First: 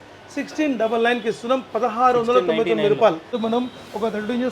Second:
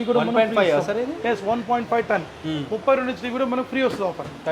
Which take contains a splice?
first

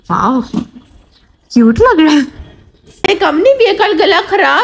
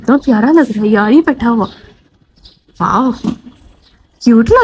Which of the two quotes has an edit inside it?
first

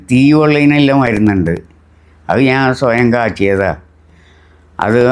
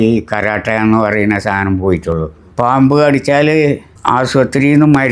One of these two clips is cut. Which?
second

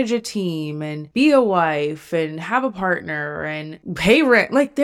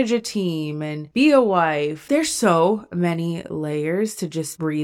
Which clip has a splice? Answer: second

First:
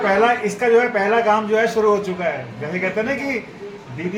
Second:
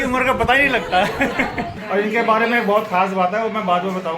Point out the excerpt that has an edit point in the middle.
second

